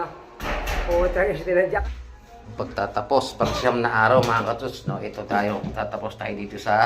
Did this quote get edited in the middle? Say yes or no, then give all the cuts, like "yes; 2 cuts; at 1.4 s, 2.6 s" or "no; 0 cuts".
yes; 1 cut; at 1.8 s